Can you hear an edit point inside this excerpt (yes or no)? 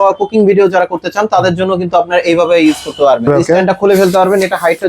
yes